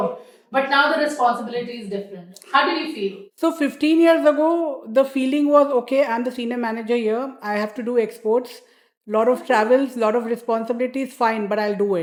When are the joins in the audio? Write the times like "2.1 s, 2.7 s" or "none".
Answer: none

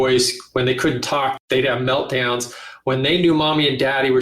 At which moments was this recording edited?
1.3 s

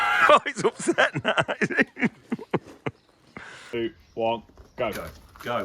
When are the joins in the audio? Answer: 3.7 s

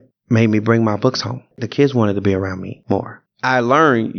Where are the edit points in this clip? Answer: 1.6 s, 3.1 s

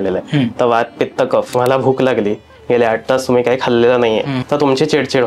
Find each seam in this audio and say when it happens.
1.5 s, 4.4 s

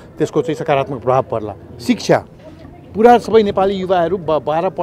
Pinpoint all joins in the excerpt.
none

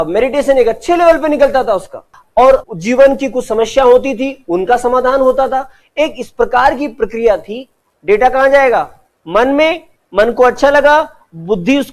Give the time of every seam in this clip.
2.1 s, 7.9 s

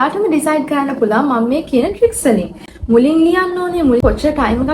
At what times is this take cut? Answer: 2.7 s, 4.0 s

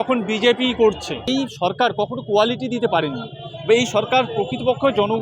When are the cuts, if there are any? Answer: 1.3 s

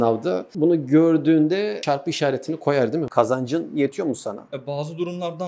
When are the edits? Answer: 3.1 s

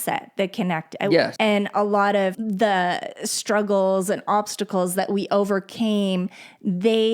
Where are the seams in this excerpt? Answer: 1.3 s, 2.4 s

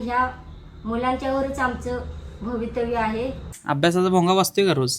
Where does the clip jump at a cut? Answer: 3.6 s

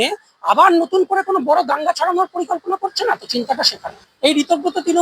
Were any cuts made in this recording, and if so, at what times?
4.0 s

